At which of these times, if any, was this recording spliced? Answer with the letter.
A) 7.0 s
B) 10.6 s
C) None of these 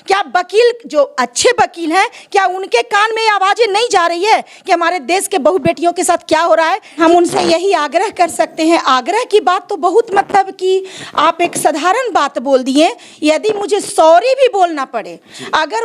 A